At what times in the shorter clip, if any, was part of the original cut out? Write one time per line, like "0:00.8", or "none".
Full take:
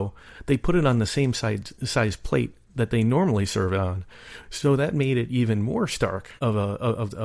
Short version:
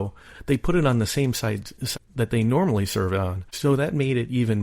0:01.9
0:03.4